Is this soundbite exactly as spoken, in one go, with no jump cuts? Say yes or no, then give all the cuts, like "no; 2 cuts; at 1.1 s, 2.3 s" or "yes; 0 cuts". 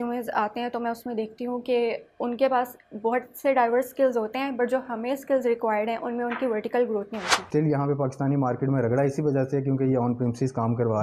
no; 1 cut; at 7.4 s